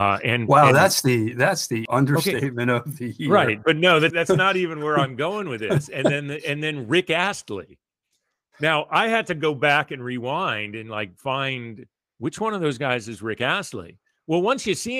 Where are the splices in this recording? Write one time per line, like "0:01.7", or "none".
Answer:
0:01.8
0:04.1